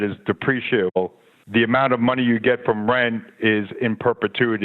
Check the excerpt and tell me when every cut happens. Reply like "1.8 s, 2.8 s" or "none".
0.9 s